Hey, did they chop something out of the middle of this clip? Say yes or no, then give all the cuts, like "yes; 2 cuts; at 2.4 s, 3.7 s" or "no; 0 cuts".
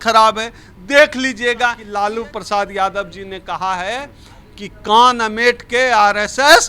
yes; 1 cut; at 1.8 s